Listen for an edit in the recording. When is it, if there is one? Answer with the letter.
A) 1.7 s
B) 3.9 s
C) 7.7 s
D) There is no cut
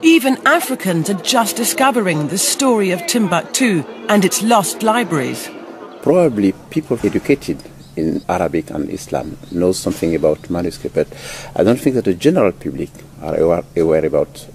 A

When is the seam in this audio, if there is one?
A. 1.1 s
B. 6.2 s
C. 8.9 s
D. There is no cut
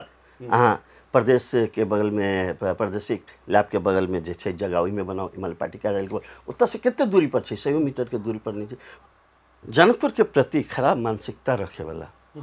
C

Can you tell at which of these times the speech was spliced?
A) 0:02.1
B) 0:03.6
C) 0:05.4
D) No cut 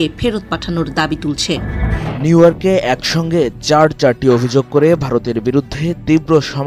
A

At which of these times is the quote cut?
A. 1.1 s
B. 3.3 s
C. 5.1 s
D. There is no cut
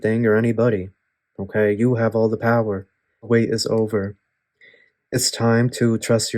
B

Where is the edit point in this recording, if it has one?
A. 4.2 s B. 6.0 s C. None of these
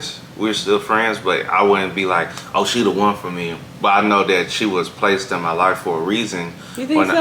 C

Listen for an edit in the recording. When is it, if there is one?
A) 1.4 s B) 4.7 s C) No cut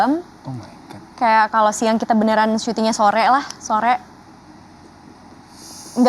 C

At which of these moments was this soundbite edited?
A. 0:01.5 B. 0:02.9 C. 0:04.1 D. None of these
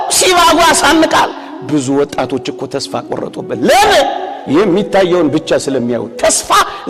D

